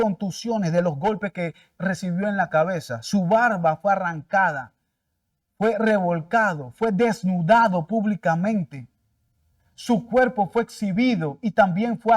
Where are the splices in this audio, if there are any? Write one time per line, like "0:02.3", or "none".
none